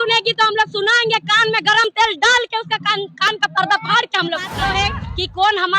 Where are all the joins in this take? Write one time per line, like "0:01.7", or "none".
0:04.6